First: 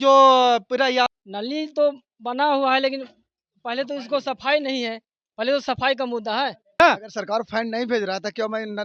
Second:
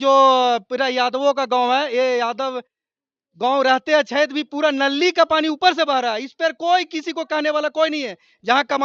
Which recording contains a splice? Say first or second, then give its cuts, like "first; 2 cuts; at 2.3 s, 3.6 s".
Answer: first; 2 cuts; at 1.1 s, 6.8 s